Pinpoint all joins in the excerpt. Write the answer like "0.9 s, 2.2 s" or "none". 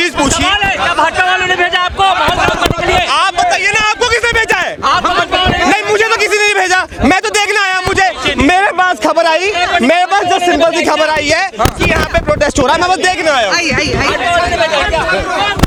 none